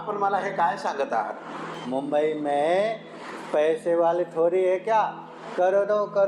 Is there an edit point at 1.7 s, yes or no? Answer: yes